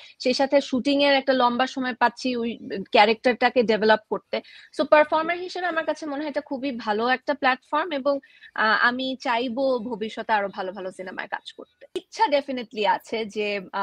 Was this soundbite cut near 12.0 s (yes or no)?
yes